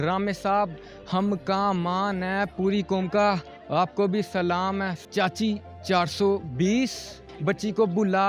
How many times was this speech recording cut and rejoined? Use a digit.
2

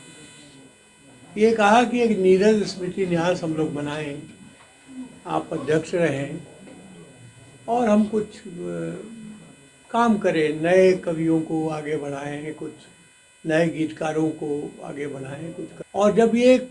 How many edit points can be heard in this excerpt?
1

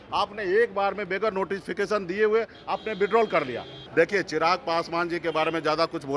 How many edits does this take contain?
1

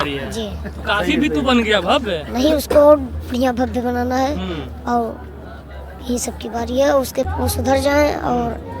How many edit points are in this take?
1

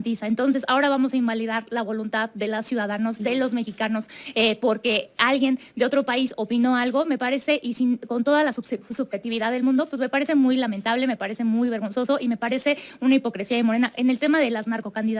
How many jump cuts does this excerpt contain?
0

